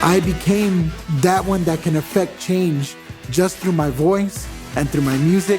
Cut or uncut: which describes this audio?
cut